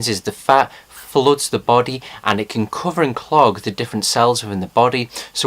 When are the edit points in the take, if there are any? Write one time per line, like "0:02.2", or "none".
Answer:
0:03.2